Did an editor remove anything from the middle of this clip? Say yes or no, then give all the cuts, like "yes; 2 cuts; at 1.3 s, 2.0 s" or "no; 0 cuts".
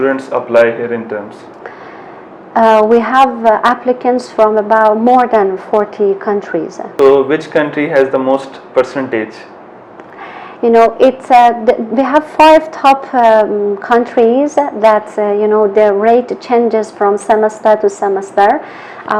no; 0 cuts